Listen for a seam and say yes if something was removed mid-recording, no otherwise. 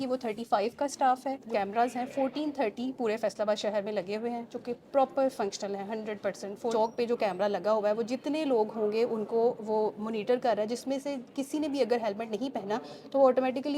yes